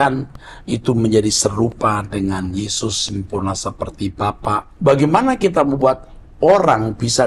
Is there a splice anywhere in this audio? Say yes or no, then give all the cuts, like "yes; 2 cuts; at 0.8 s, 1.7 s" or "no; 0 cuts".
yes; 1 cut; at 4.7 s